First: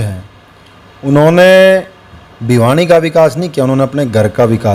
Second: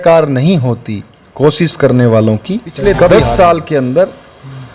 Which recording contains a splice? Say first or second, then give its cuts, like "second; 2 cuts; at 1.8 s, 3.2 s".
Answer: second; 1 cut; at 3.1 s